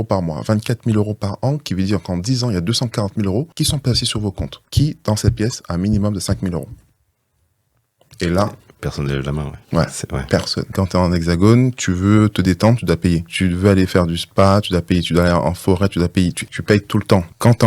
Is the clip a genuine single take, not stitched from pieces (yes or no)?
no